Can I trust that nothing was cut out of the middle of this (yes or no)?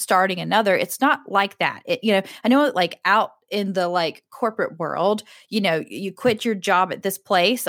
yes